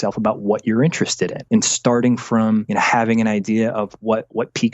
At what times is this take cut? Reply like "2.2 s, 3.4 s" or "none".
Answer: 1.4 s, 2.7 s